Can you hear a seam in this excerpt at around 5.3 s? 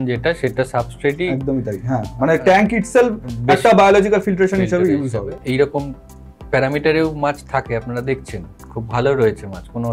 yes; 1 cut; at 5.3 s

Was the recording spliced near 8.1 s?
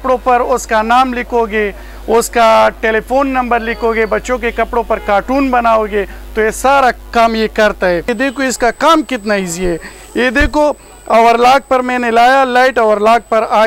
yes; 1 cut; at 8.1 s

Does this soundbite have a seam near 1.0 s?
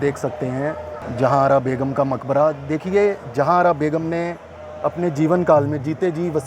yes; 1 cut; at 1.0 s

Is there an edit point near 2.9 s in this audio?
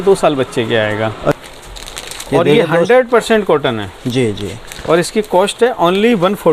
no; 1 cut; at 1.3 s

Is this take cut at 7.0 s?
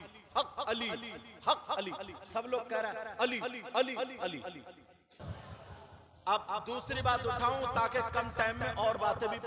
no; 1 cut; at 5.3 s

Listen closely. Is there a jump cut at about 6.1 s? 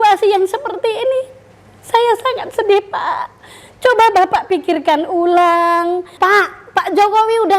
yes; 1 cut; at 6.1 s

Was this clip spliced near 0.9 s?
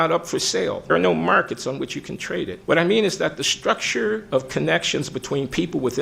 yes; 2 cuts; at 0.9 s, 2.6 s

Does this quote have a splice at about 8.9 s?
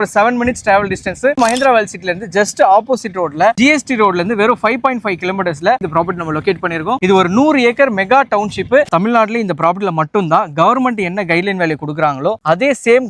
yes; 4 cuts; at 1.4 s, 3.6 s, 5.8 s, 8.9 s

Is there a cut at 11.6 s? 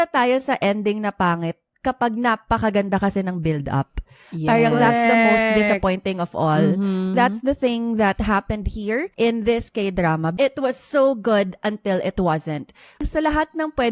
no; 4 cuts; at 7.1 s, 9.1 s, 10.3 s, 13.0 s

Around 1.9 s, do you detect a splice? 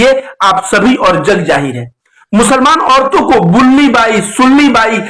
no; 0 cuts

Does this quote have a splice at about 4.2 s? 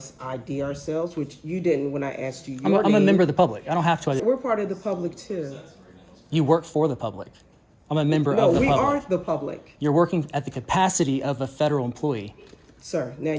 yes; 1 cut; at 4.2 s

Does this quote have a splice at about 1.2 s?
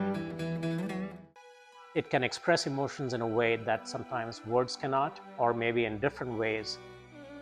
yes; 1 cut; at 1.2 s

